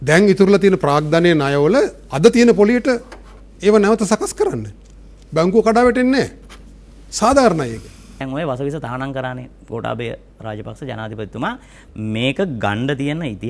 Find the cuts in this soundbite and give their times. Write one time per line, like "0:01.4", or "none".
0:08.1